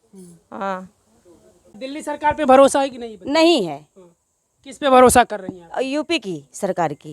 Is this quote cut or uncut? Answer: cut